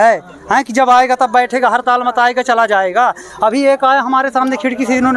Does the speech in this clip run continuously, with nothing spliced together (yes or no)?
yes